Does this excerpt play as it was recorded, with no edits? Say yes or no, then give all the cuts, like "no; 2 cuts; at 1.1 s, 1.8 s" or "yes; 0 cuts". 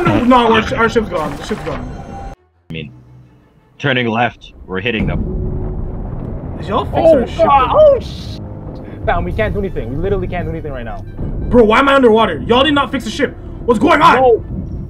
no; 1 cut; at 2.7 s